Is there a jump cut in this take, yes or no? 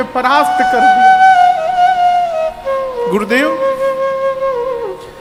no